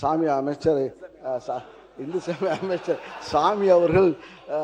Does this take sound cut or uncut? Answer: uncut